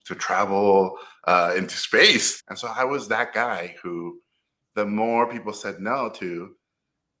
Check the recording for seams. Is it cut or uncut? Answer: cut